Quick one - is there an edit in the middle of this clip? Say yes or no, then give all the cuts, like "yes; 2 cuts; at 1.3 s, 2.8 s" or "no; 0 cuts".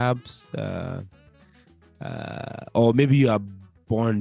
no; 0 cuts